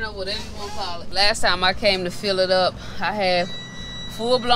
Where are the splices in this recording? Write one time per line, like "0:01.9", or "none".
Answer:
0:01.1

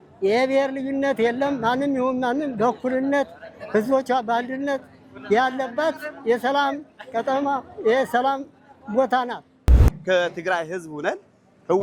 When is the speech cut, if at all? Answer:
0:09.7

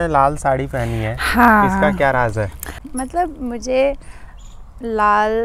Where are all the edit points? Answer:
none

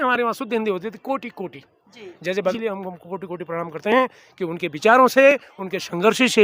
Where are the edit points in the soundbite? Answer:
0:02.6

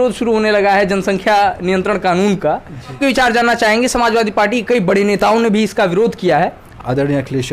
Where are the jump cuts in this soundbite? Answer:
0:03.0
0:06.6

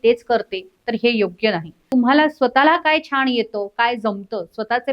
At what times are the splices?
0:01.9

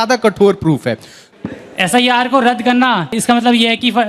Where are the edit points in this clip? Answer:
0:01.3
0:03.1

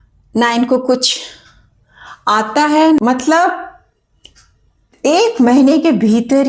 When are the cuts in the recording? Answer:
0:03.0

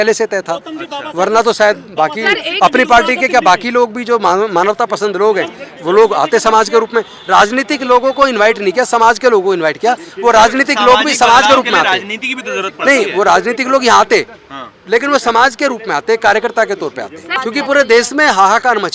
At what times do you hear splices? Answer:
0:17.3

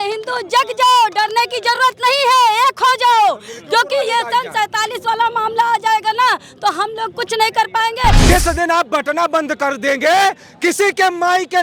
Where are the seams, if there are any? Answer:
0:08.2

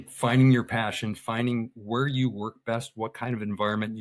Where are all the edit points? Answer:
none

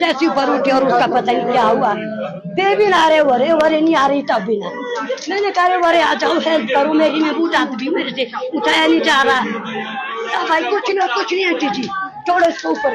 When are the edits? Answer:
none

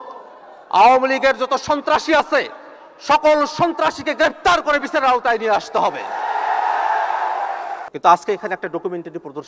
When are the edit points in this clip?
0:07.8

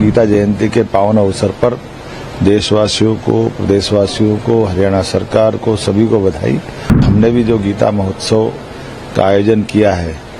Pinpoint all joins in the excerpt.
0:07.0

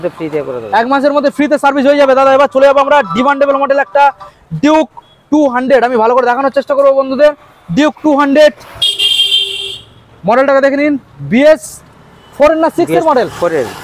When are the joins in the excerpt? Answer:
none

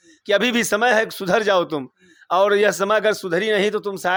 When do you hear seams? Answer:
none

